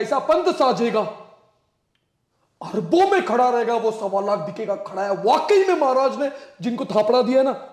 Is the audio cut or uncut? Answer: uncut